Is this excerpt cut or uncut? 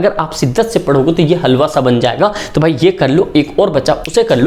uncut